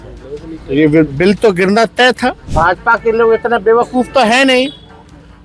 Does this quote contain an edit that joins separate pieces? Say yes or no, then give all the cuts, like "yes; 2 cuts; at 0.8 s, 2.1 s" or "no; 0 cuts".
yes; 1 cut; at 2.5 s